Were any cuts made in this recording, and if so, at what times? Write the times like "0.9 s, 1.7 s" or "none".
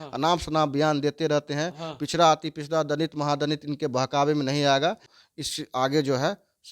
5.1 s

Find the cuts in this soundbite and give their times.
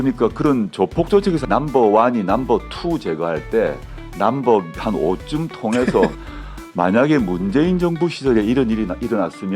1.4 s, 6.1 s

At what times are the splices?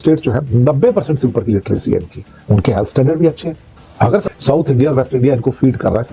4.2 s

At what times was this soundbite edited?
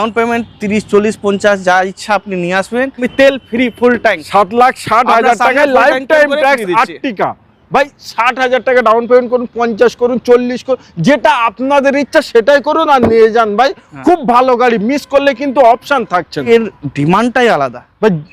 3.1 s, 16.5 s

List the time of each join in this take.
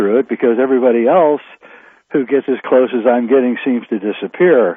none

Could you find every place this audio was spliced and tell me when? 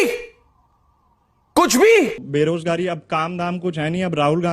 2.2 s

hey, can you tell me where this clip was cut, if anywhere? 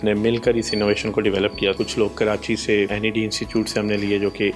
1.8 s, 2.9 s

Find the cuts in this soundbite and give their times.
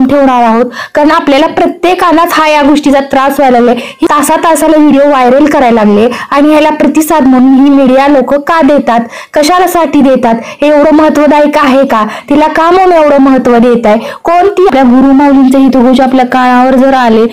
4.0 s, 14.7 s

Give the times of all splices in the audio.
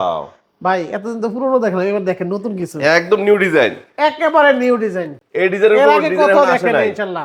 none

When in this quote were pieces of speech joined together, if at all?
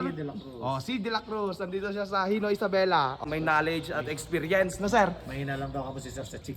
3.2 s

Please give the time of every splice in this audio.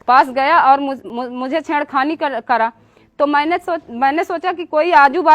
1.1 s

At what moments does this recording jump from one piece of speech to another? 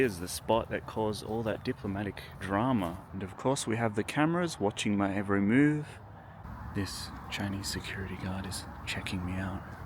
2.3 s, 3.1 s, 6.5 s

